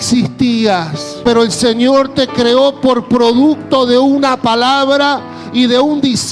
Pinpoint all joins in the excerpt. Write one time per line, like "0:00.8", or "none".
0:01.1